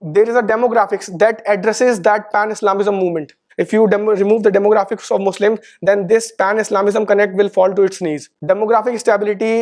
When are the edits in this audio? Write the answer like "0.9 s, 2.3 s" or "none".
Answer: 8.3 s